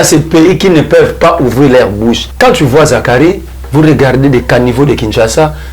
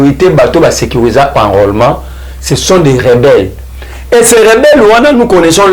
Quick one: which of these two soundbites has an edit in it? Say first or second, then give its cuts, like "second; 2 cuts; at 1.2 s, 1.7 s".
first; 1 cut; at 2.3 s